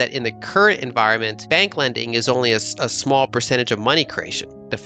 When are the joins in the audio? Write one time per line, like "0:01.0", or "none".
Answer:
0:01.3